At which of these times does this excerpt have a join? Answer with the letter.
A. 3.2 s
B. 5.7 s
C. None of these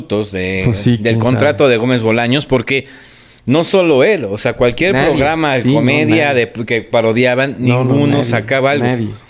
C